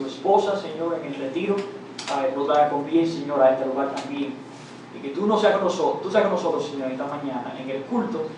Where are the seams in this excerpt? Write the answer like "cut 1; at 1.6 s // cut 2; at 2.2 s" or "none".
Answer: cut 1; at 2.8 s